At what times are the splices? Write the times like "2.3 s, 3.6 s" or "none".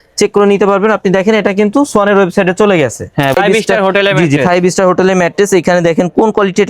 3.3 s